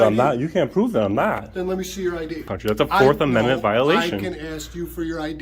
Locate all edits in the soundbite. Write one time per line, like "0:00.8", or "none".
0:02.4